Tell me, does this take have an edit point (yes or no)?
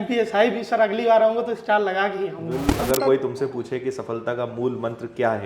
yes